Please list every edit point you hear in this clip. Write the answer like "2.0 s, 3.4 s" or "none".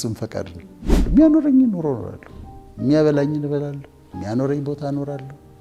1.0 s